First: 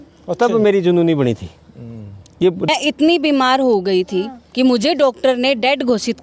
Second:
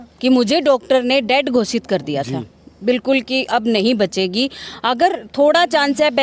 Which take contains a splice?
first; 1 cut; at 2.7 s

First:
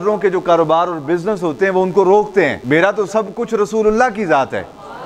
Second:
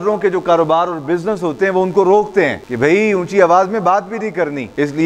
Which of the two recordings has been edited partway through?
first; 1 cut; at 2.6 s

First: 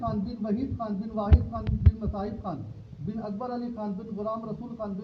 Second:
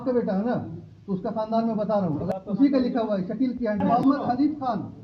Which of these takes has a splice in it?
second; 2 cuts; at 2.2 s, 3.8 s

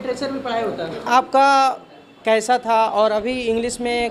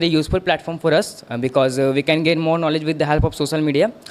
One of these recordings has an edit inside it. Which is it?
first; 1 cut; at 1.1 s

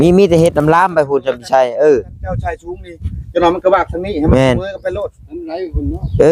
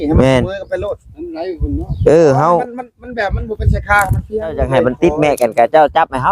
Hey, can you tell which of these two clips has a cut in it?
second; 1 cut; at 4.7 s

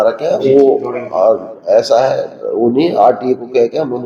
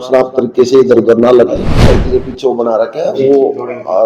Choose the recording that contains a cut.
second; 1 cut; at 1.8 s

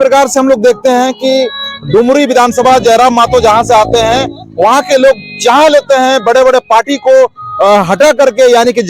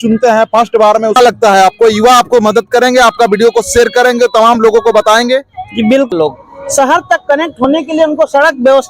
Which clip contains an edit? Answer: second; 2 cuts; at 1.2 s, 6.1 s

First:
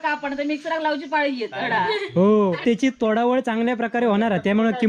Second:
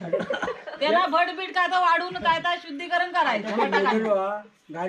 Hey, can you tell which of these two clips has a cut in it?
first; 1 cut; at 2.6 s

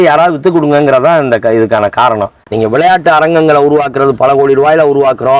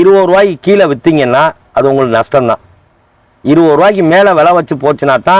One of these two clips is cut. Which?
first; 1 cut; at 2.4 s

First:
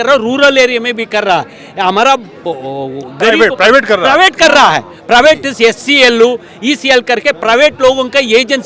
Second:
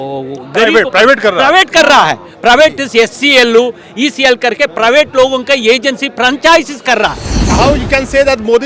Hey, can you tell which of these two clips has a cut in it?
second; 1 cut; at 7.5 s

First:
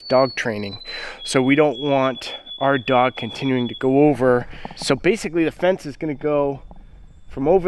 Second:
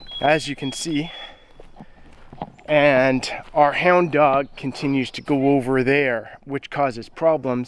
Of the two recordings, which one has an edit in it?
first; 1 cut; at 4.7 s

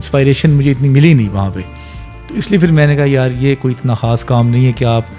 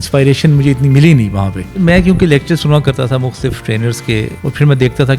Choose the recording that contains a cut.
second; 2 cuts; at 1.8 s, 4.3 s

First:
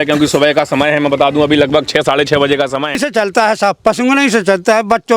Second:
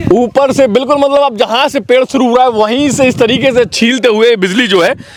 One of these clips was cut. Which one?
first; 1 cut; at 3.0 s

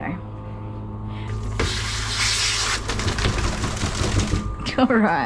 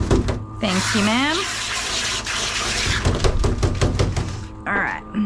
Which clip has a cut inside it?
first; 1 cut; at 1.3 s

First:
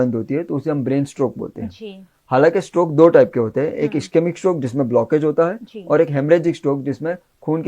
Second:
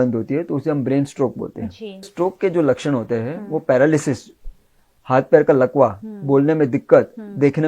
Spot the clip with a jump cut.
second; 1 cut; at 2.1 s

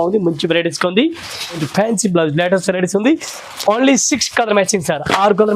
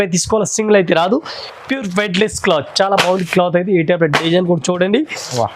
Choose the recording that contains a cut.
first; 1 cut; at 1.6 s

